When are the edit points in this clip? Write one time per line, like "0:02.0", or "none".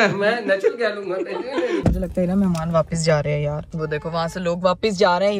0:01.8
0:03.7